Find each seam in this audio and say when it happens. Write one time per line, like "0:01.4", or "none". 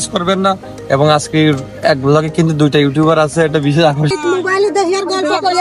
0:04.1